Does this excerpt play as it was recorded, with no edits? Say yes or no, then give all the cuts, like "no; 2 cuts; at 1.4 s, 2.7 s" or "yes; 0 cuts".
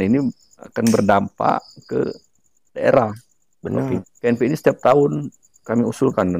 no; 1 cut; at 4.1 s